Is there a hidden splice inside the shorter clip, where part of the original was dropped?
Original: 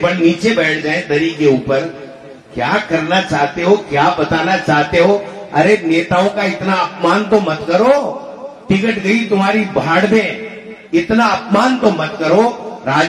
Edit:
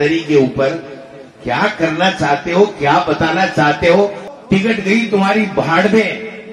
yes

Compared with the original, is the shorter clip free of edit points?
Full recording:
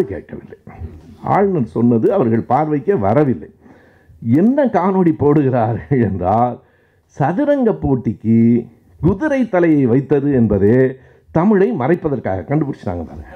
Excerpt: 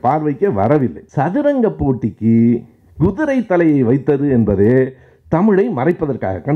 no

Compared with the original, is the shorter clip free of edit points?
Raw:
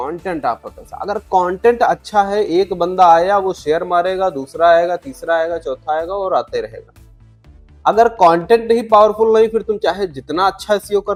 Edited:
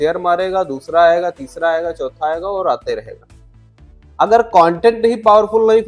yes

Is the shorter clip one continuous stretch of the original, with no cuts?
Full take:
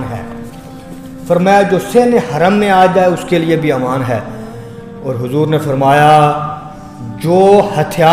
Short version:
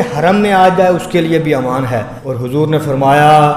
no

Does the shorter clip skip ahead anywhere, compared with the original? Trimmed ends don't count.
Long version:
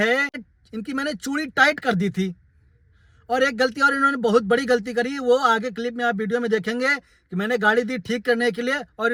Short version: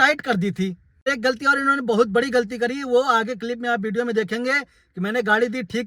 yes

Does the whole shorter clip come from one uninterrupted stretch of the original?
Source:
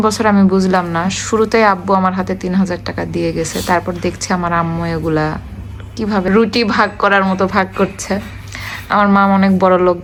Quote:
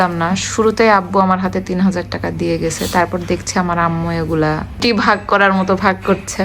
no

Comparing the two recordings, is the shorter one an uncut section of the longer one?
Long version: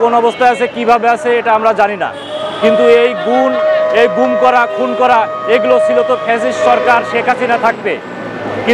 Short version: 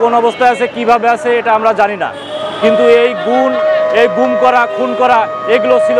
yes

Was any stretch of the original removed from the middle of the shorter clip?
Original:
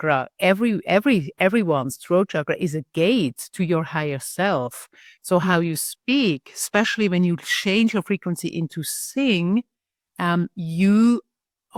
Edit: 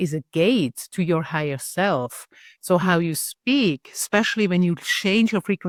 no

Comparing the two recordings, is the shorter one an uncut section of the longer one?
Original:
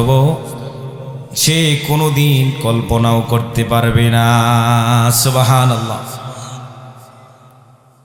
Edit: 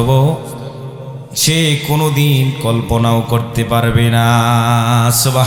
yes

